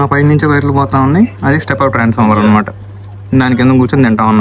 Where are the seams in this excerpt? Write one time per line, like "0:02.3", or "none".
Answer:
none